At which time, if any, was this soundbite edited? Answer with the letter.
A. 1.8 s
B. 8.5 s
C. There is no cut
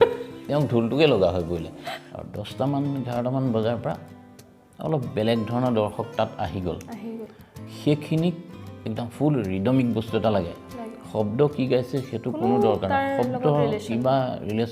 A